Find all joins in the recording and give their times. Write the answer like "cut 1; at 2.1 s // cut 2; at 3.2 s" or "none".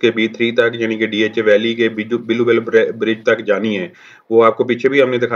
none